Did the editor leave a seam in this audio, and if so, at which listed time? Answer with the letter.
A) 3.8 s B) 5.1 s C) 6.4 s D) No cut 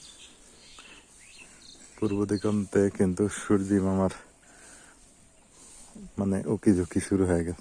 D